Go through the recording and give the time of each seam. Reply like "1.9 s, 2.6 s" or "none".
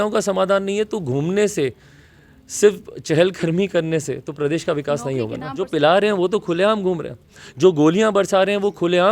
5.7 s

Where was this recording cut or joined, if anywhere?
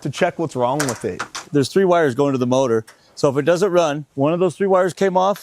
1.3 s, 4.0 s

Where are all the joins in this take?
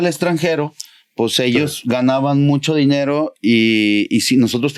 none

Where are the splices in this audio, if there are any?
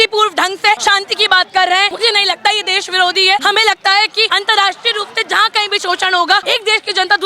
0.8 s, 1.9 s, 3.4 s, 4.3 s, 6.4 s

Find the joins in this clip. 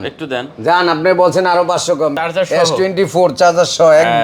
2.2 s

